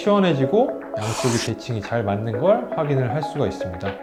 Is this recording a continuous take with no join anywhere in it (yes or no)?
yes